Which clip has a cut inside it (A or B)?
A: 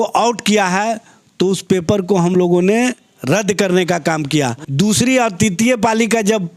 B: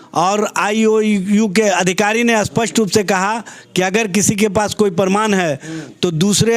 A